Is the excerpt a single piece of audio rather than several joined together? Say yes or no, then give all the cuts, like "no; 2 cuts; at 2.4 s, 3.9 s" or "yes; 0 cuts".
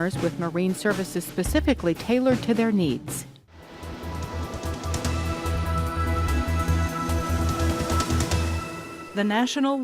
no; 1 cut; at 3.3 s